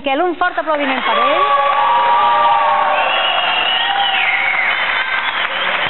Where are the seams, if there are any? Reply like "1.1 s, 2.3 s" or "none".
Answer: 2.5 s